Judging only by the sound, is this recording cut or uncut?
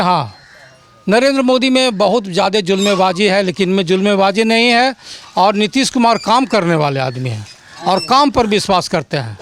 uncut